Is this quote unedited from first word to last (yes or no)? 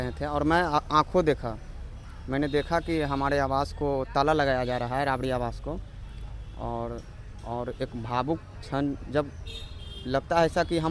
yes